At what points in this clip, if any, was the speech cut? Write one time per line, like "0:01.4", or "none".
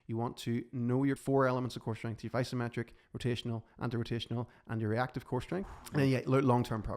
0:01.2
0:05.7